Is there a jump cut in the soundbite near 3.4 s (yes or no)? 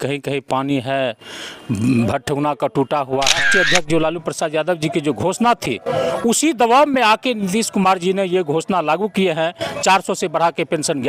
yes